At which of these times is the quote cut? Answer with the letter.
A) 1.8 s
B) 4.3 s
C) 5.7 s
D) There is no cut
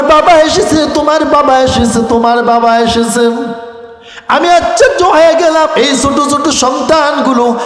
C